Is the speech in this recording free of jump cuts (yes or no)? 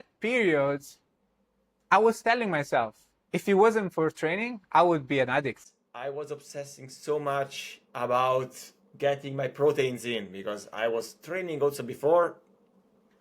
no